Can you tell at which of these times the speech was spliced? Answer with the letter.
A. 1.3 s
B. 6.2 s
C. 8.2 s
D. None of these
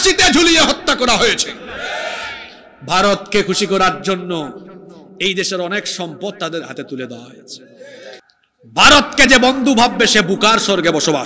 C